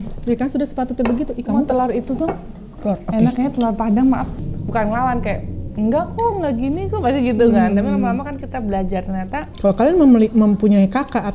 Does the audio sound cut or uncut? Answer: cut